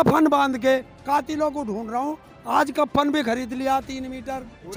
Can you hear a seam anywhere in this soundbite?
no; 0 cuts

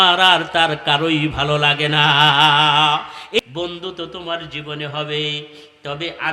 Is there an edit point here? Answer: yes; 1 cut; at 3.4 s

